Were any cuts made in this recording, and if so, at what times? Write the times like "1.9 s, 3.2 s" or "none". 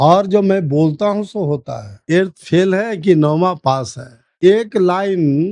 2.0 s, 4.3 s

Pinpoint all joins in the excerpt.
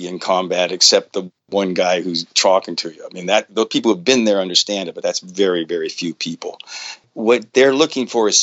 7.0 s

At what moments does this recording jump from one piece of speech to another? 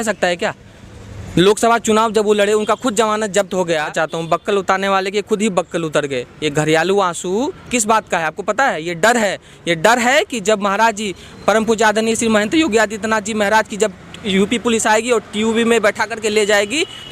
3.9 s

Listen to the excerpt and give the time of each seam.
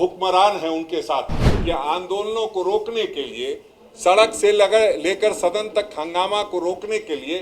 1.4 s

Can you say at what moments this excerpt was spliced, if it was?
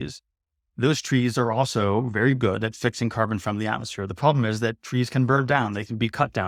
none

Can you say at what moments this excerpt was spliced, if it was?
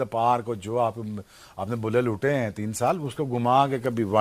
3.1 s

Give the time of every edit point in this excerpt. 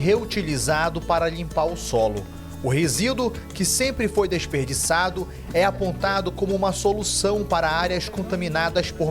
none

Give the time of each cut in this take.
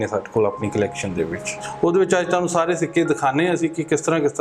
1.6 s

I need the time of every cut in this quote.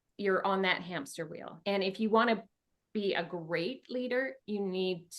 1.5 s

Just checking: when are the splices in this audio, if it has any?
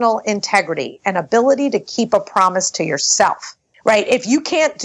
none

